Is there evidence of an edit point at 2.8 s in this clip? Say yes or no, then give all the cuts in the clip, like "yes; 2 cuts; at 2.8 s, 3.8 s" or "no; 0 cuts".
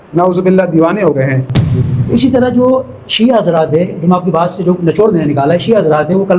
no; 1 cut; at 1.5 s